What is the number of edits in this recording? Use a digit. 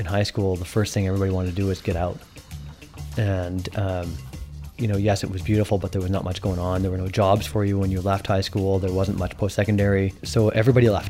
1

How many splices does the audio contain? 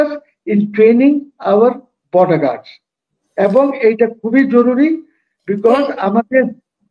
0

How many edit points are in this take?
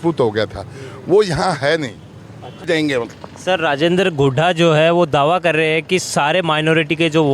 1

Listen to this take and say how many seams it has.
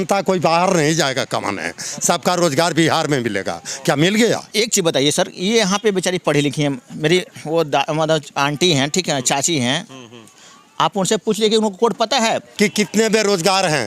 2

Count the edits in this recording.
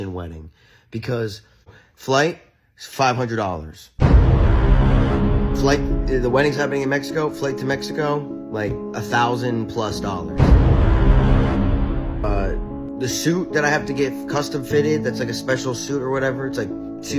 1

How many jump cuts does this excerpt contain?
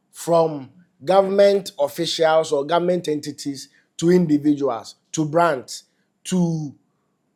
0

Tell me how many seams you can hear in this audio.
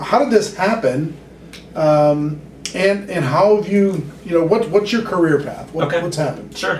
1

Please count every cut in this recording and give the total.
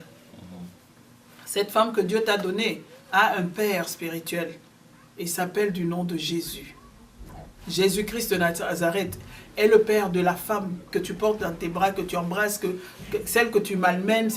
0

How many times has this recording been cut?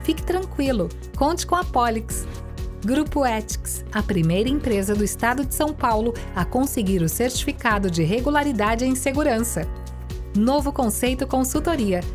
0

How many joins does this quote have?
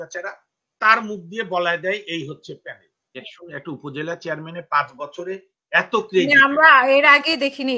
1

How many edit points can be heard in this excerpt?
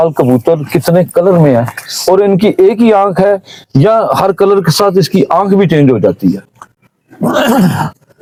0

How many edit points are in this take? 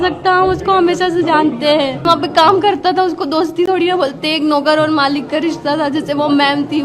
1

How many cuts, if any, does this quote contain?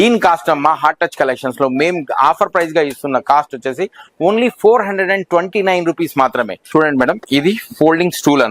1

